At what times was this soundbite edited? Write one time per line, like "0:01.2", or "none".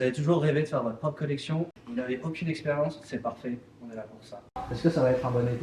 0:01.8
0:04.6